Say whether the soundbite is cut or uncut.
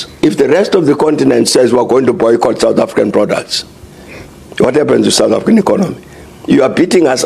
uncut